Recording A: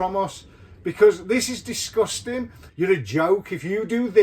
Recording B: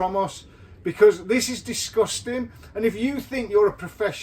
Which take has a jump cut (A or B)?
A